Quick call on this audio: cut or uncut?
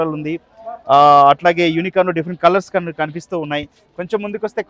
uncut